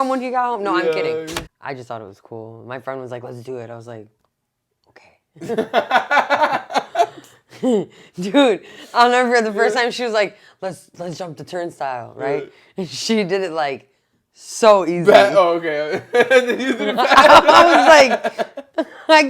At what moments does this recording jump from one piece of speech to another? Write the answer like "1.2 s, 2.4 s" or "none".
1.4 s